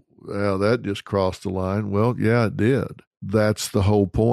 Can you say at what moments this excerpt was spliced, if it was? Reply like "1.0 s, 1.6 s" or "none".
3.2 s